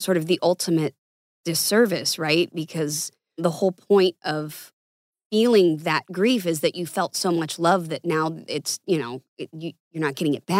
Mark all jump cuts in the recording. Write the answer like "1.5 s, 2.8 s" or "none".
3.4 s